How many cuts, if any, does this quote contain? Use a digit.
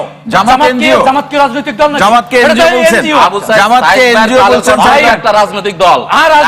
0